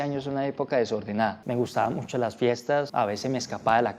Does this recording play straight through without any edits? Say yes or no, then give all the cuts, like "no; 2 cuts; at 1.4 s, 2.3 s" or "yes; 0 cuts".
no; 2 cuts; at 1.4 s, 2.9 s